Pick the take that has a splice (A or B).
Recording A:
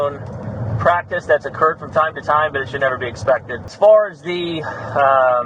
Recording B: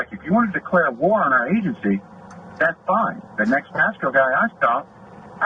A